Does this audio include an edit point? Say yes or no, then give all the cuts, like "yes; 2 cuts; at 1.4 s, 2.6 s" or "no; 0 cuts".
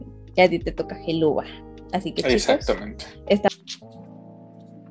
yes; 1 cut; at 3.5 s